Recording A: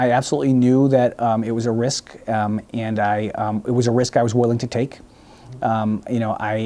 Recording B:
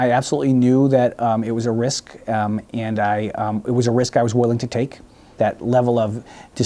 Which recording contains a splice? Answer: B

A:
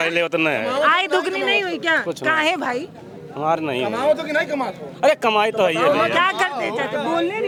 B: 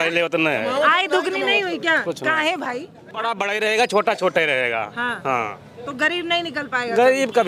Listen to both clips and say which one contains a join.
B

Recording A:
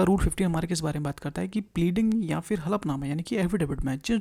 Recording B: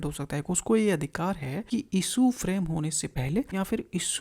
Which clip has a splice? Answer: B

